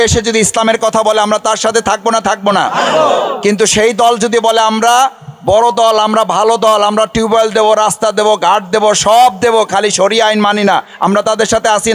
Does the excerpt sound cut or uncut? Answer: uncut